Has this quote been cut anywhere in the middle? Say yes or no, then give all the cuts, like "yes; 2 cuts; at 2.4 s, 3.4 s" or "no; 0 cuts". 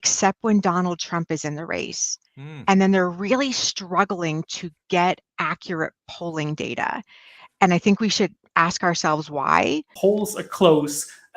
yes; 1 cut; at 9.9 s